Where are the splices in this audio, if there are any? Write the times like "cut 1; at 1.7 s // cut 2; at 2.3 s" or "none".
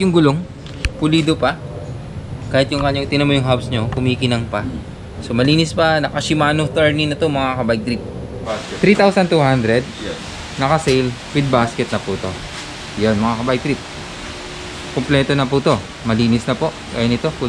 cut 1; at 8.5 s